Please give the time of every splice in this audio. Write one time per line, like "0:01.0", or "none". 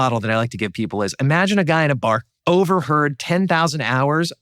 0:02.3